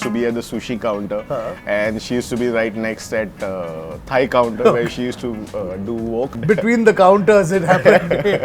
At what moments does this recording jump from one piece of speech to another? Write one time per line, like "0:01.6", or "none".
0:06.3